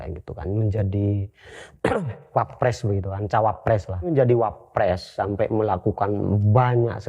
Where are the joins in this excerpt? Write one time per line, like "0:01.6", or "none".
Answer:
0:04.1